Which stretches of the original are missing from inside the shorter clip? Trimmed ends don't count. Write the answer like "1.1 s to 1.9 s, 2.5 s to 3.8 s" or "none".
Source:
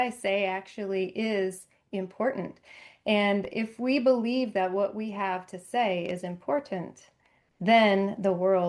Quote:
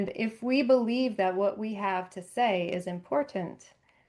none